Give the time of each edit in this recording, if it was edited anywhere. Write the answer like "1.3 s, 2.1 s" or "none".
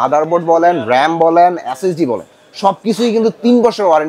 none